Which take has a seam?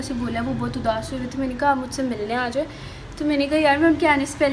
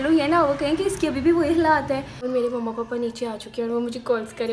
second; 1 cut; at 2.2 s

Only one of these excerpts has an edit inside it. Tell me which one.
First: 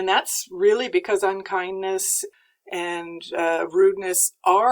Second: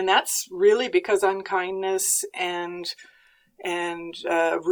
first; 1 cut; at 2.2 s

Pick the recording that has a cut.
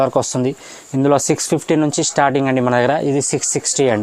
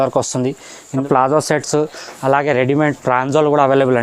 second; 1 cut; at 1.0 s

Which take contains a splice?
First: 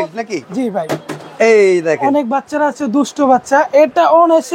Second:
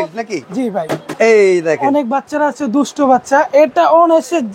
second; 1 cut; at 1.1 s

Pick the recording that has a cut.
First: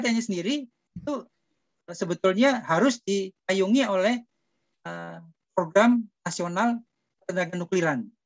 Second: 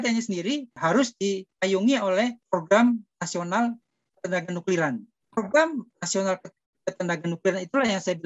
second; 4 cuts; at 0.8 s, 2.4 s, 5.2 s, 6.0 s

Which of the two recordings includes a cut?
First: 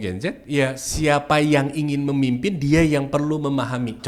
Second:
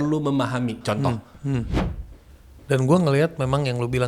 second; 1 cut; at 1.9 s

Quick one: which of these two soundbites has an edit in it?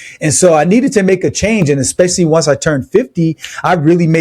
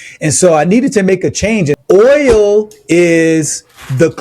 second; 1 cut; at 1.8 s

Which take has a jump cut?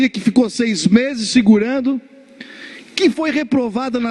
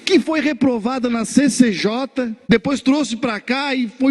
second; 1 cut; at 2.5 s

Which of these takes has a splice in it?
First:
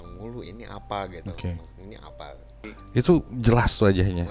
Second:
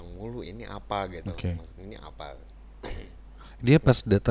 first; 1 cut; at 2.7 s

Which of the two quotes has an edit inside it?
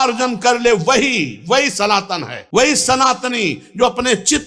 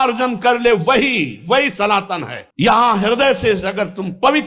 second; 1 cut; at 2.3 s

